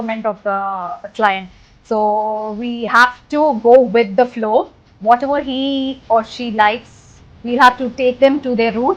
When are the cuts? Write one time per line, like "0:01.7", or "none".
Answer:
none